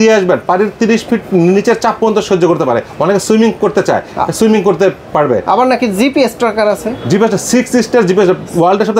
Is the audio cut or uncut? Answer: uncut